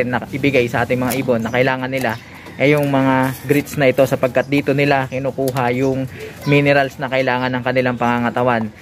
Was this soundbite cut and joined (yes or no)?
no